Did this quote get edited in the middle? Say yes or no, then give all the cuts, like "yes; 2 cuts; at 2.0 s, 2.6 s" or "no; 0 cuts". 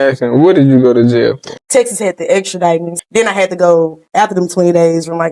yes; 2 cuts; at 1.5 s, 2.9 s